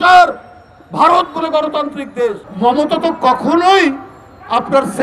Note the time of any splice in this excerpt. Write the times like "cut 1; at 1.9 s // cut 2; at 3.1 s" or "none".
cut 1; at 2.5 s

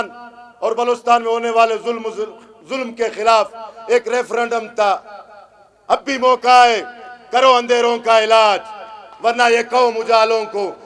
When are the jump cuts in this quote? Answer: none

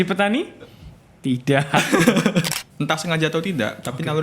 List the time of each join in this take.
cut 1; at 2.6 s

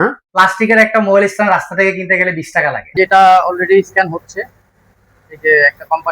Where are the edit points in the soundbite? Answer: cut 1; at 2.8 s

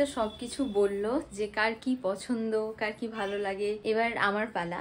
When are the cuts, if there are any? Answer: cut 1; at 3.8 s

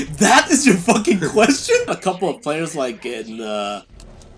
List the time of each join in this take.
cut 1; at 1.9 s

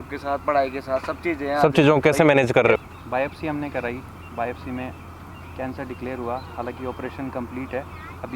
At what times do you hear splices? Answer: cut 1; at 2.8 s

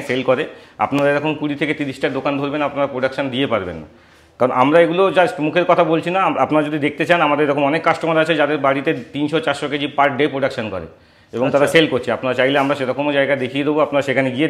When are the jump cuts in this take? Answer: none

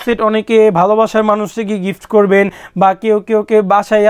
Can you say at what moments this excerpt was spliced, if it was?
none

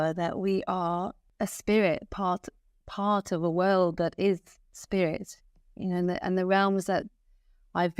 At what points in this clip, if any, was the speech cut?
cut 1; at 1.2 s

